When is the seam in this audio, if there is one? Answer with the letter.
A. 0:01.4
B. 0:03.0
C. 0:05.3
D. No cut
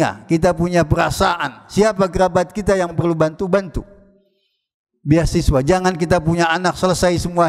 B